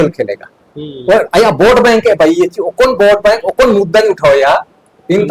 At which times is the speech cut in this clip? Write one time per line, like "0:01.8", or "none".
none